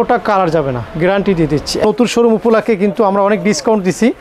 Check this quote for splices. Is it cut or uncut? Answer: cut